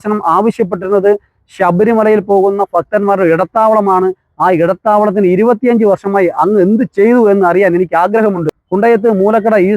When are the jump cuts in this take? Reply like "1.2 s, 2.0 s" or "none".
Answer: 8.5 s